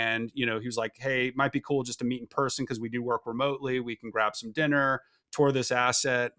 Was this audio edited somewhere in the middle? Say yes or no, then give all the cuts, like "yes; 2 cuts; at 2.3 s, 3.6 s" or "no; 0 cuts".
no; 0 cuts